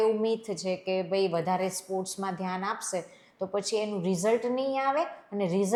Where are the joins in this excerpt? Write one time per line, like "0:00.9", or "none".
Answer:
none